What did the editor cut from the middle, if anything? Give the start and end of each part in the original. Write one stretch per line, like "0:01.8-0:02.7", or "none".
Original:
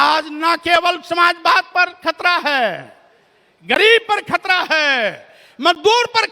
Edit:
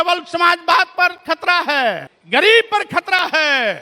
0:02.9-0:03.5